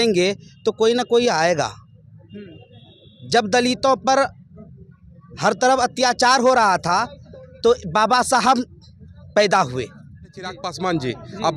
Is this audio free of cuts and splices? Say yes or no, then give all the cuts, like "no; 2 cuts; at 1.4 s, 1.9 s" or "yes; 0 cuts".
no; 1 cut; at 10.6 s